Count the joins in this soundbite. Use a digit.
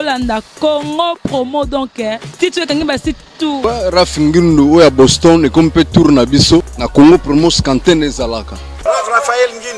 3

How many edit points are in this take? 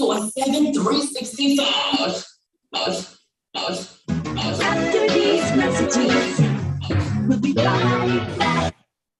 0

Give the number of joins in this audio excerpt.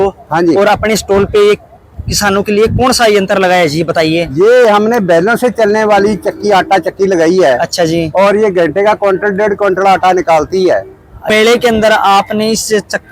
1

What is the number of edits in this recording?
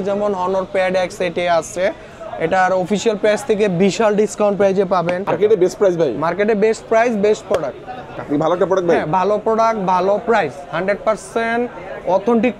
2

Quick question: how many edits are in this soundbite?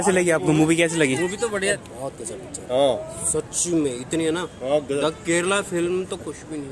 1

